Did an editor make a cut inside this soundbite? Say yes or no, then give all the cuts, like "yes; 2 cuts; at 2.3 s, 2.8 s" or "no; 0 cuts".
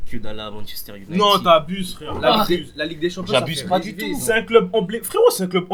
no; 0 cuts